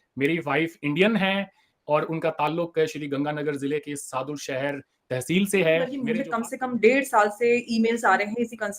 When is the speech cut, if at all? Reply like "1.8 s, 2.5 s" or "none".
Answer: 6.0 s